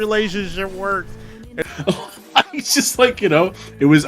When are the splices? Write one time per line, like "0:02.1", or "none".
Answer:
0:01.5